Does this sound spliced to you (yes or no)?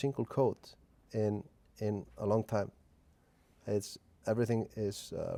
no